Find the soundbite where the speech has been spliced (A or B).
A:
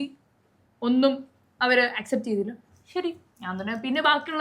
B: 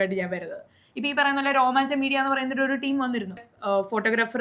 B